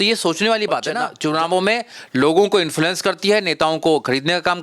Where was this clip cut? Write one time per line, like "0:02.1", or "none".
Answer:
0:01.0